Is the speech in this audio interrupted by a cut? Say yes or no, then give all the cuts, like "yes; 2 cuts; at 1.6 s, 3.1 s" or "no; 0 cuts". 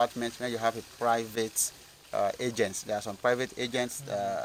no; 0 cuts